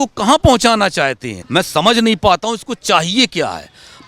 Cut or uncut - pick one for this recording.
cut